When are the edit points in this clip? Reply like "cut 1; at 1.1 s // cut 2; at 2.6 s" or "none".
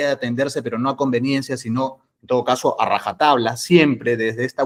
none